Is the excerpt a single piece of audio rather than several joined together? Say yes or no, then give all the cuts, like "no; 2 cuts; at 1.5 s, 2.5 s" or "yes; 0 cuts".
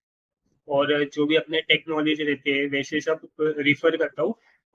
yes; 0 cuts